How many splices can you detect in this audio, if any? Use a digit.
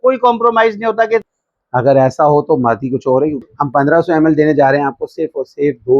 2